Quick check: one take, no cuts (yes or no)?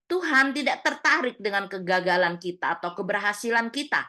yes